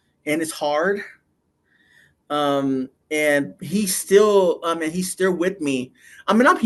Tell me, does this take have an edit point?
no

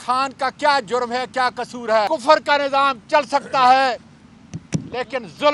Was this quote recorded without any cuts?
no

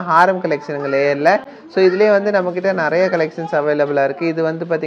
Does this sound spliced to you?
no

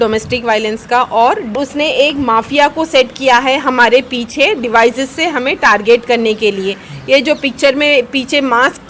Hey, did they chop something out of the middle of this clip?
yes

